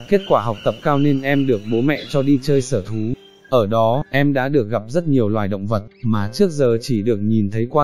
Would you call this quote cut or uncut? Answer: uncut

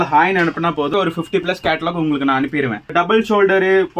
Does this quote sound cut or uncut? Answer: cut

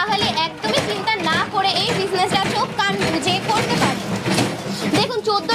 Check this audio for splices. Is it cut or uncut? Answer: cut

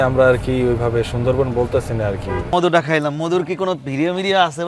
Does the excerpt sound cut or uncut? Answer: cut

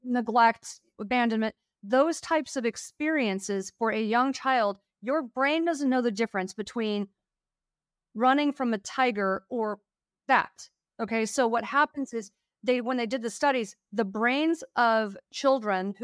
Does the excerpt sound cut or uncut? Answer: cut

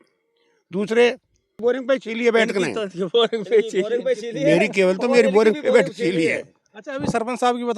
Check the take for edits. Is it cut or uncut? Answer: cut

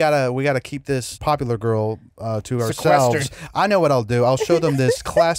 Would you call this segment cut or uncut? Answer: cut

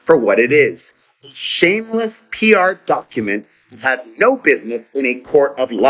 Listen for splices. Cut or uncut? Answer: uncut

